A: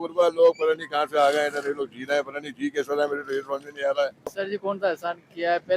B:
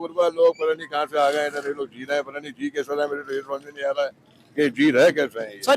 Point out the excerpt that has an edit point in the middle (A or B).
A